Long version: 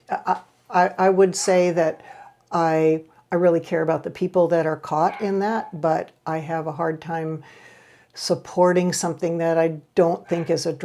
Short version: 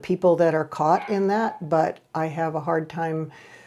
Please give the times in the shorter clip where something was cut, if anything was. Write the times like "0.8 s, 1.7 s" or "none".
none